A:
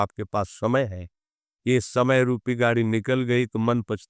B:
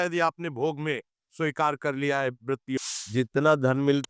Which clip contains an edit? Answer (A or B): B